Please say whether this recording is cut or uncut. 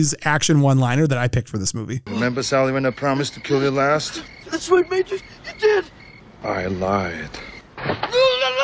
uncut